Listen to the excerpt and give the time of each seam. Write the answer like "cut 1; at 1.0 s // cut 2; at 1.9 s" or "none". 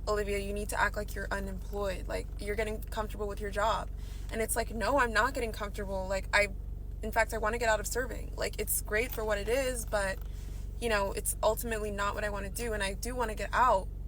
none